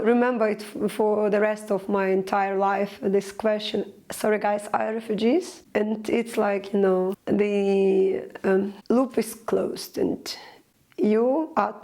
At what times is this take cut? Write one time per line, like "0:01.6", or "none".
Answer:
0:05.6
0:07.2
0:08.8